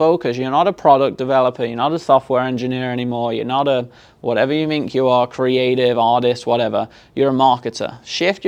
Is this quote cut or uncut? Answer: uncut